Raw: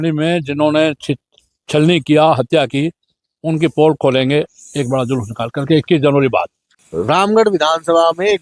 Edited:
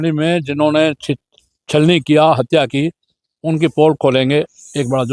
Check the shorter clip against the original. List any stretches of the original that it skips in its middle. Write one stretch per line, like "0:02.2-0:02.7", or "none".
none